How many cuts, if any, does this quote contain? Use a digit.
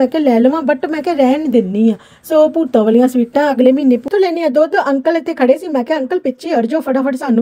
1